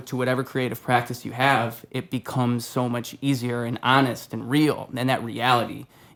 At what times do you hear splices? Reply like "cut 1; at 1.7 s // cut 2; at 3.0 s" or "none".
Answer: none